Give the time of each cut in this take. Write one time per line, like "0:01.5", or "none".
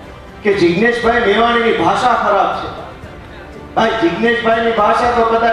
none